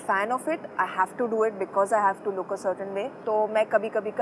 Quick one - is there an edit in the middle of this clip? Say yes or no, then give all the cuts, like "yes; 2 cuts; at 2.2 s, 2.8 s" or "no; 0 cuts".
no; 0 cuts